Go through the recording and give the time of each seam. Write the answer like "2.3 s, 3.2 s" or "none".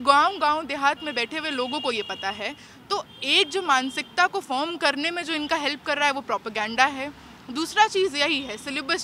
none